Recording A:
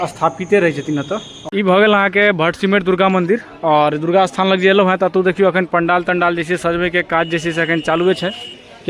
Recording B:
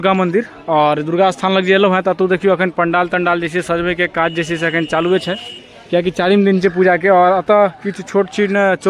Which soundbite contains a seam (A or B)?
A